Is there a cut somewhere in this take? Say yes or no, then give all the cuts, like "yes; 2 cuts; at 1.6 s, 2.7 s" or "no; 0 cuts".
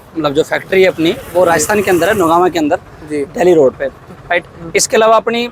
no; 0 cuts